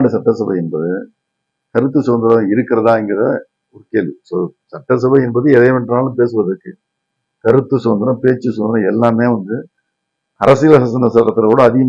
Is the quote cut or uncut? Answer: uncut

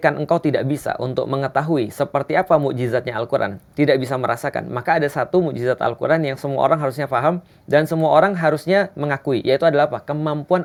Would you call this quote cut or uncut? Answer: uncut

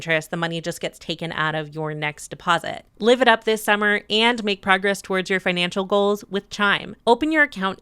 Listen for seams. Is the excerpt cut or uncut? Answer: cut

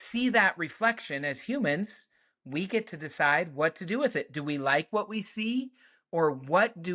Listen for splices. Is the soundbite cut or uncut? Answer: uncut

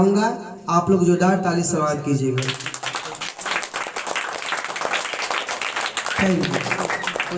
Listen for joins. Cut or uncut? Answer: uncut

